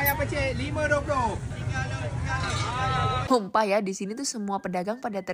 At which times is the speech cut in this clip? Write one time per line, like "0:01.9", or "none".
0:03.6

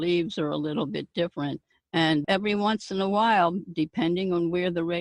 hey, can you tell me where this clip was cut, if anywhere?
0:02.2

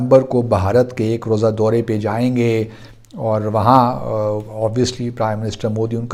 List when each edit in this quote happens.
none

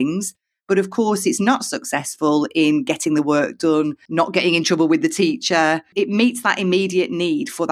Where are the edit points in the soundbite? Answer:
0:04.0

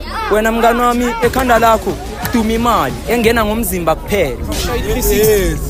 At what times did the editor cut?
0:04.7

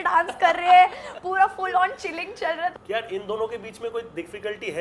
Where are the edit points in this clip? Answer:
0:02.8

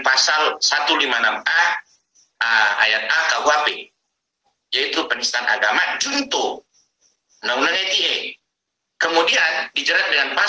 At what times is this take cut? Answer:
none

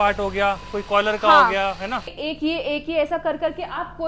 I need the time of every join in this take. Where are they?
0:02.1

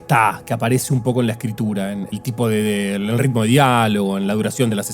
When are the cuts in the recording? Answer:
0:02.1

